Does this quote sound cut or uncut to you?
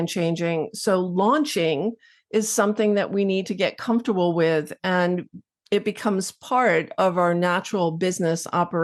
uncut